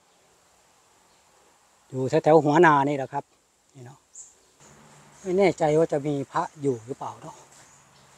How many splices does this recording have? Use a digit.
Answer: 1